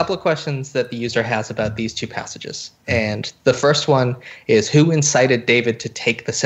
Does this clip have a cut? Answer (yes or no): no